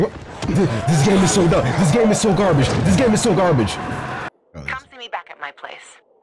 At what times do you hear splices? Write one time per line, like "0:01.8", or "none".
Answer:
0:04.3